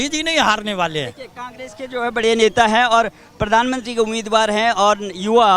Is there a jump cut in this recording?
no; 0 cuts

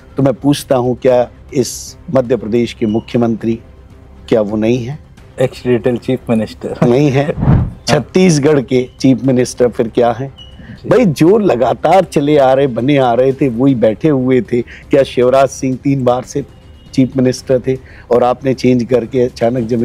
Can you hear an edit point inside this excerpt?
no; 0 cuts

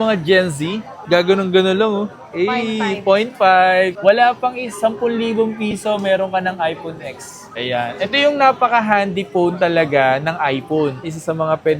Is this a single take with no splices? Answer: no; 3 cuts; at 4.0 s, 7.5 s, 11.0 s

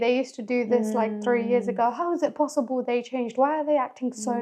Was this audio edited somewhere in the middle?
no; 0 cuts

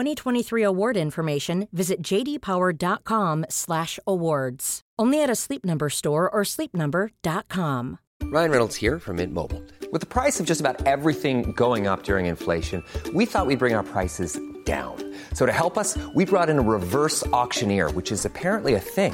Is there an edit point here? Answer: yes; 1 cut; at 8.0 s

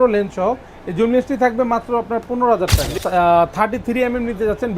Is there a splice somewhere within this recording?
yes; 1 cut; at 3.0 s

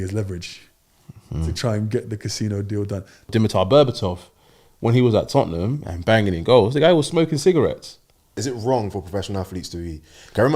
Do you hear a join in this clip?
yes; 2 cuts; at 3.3 s, 8.4 s

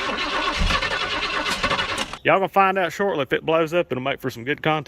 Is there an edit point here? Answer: yes; 1 cut; at 2.1 s

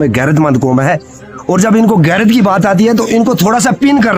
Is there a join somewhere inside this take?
no; 0 cuts

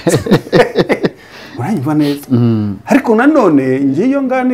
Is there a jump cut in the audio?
no; 0 cuts

